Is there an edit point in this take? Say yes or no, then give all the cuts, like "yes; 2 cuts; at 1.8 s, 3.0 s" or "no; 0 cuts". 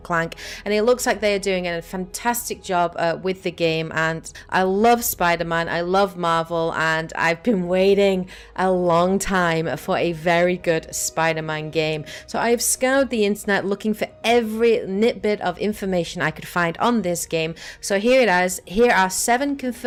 no; 0 cuts